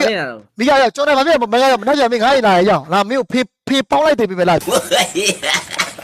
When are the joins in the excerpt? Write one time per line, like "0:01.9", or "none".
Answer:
0:04.6